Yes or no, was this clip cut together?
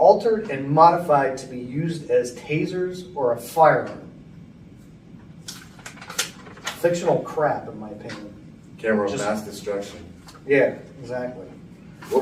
no